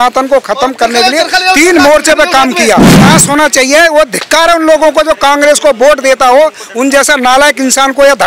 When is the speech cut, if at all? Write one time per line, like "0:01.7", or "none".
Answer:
0:03.0